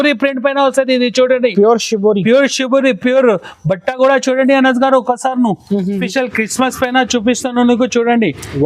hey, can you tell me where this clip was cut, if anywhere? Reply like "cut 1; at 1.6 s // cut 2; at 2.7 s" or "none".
cut 1; at 5.9 s